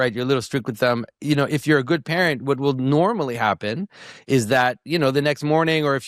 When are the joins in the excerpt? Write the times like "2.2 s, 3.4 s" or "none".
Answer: none

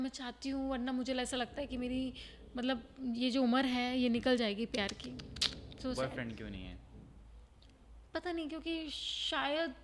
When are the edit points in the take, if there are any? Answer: none

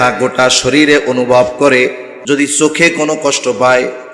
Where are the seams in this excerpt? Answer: 2.1 s

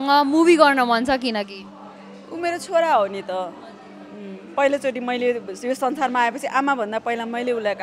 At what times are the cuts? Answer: none

